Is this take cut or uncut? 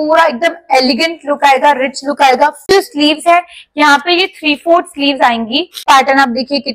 cut